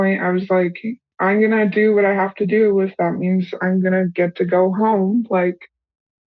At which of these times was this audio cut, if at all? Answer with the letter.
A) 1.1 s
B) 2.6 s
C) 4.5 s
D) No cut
A